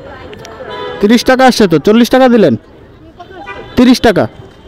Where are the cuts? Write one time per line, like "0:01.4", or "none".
none